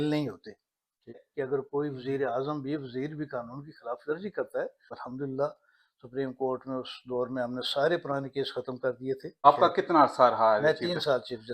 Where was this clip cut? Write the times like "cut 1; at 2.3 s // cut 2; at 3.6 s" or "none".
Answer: cut 1; at 1.2 s // cut 2; at 4.9 s // cut 3; at 9.3 s